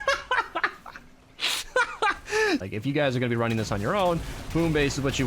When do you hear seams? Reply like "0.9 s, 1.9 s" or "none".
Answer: 2.6 s